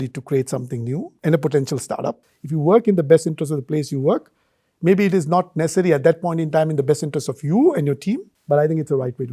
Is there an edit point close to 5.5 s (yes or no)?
no